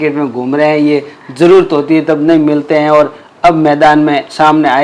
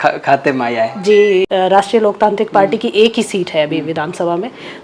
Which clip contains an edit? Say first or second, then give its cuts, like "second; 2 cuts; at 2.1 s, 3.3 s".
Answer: second; 1 cut; at 1.4 s